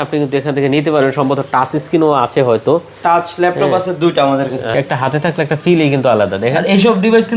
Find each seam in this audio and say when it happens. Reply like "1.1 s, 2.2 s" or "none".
4.7 s

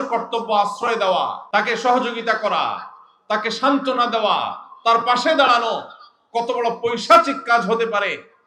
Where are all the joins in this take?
1.4 s

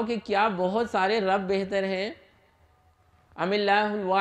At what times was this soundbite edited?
none

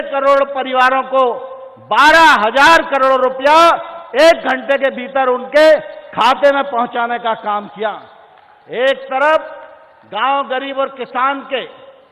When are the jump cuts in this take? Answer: none

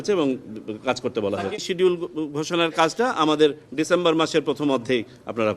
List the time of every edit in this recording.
1.6 s

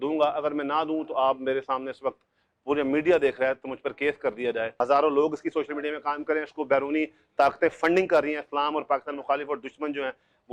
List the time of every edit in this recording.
4.7 s

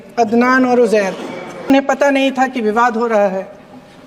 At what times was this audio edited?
1.7 s

